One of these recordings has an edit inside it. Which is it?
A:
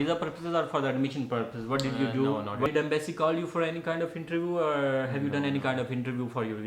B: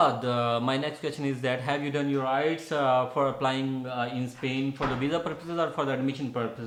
A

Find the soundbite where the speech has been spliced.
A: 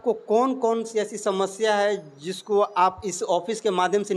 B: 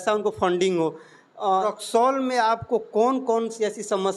B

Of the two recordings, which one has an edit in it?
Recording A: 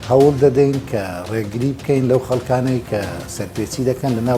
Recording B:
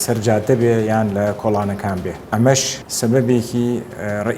B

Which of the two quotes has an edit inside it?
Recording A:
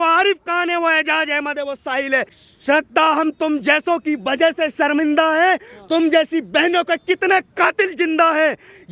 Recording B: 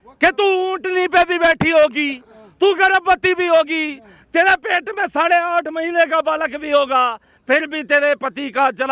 A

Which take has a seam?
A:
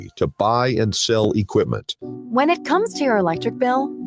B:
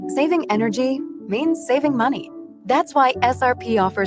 A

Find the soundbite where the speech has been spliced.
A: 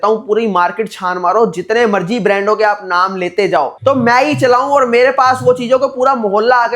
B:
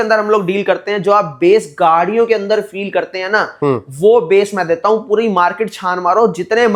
A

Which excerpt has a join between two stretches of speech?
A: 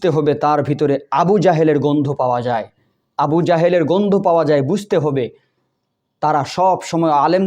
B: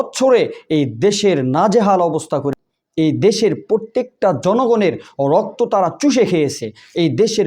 B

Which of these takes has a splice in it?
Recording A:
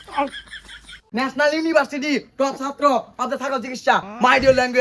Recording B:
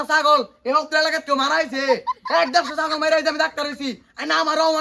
A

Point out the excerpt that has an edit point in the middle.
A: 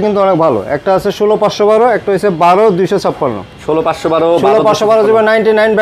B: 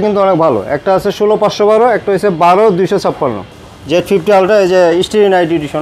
B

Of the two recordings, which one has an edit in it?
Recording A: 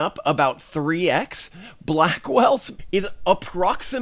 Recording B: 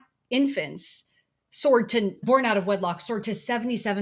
A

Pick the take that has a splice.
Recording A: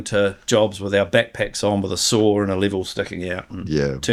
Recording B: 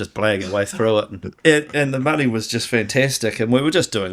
B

